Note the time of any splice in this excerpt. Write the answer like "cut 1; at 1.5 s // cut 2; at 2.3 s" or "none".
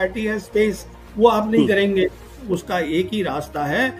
cut 1; at 2.4 s

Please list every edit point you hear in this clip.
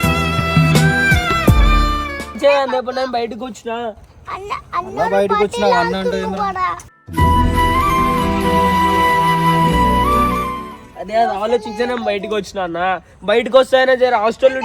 cut 1; at 2.3 s // cut 2; at 10.6 s

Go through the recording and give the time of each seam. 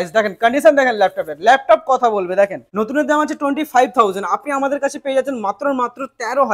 cut 1; at 2.6 s

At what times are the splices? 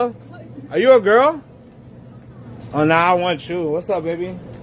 none

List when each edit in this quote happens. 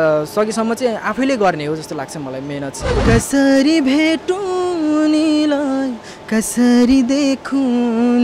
cut 1; at 2.9 s

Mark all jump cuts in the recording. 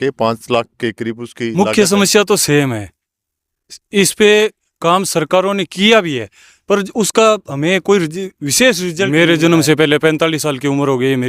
cut 1; at 1.5 s // cut 2; at 9.1 s

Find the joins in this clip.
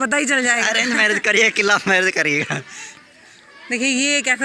none

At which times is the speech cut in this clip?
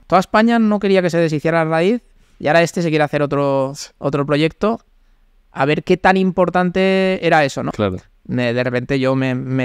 cut 1; at 7.7 s

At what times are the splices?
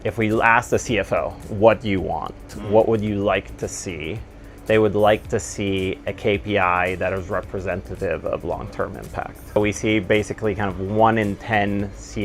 cut 1; at 9.6 s

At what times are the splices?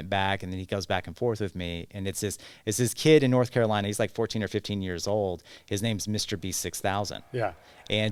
none

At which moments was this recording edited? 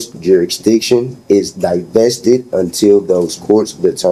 none

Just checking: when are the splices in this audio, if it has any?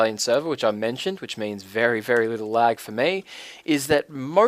none

